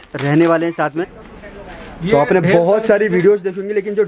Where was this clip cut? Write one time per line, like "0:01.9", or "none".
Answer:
0:01.2